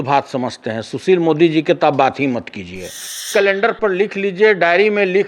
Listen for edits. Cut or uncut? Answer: cut